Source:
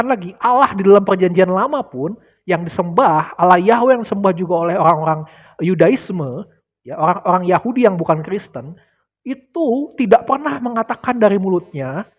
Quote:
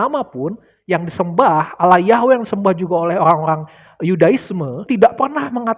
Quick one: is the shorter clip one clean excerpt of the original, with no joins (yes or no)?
no